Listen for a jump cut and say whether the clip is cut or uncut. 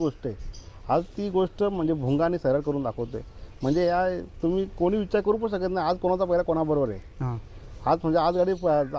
uncut